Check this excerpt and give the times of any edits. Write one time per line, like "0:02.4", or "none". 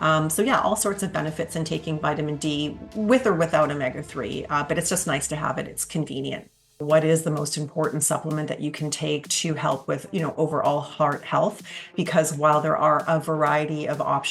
0:06.8